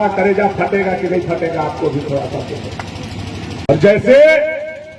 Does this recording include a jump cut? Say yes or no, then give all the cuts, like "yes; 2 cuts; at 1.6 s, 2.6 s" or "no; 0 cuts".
yes; 1 cut; at 3.7 s